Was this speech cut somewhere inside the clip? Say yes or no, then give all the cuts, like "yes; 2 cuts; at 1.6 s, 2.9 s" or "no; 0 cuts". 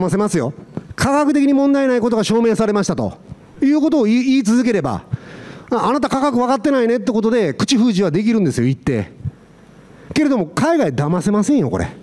no; 0 cuts